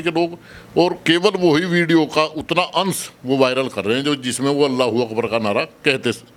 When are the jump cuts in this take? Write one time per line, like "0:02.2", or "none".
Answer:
none